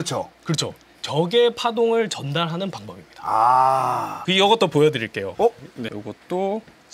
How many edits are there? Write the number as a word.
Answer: two